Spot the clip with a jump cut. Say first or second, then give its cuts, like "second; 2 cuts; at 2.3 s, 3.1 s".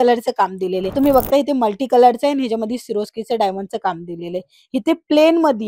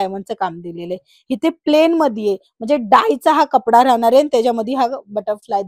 first; 1 cut; at 0.9 s